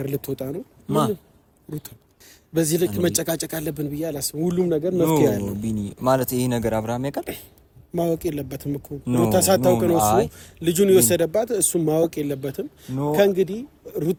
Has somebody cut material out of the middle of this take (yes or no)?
no